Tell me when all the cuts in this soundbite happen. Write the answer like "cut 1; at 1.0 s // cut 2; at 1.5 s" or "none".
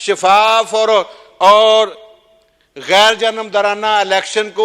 none